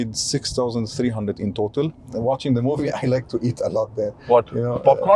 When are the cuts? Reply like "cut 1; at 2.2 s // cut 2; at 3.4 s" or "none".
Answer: cut 1; at 2.1 s